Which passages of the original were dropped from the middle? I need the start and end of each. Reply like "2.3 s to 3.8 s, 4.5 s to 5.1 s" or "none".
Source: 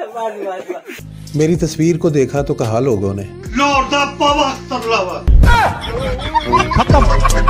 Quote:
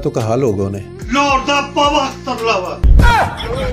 none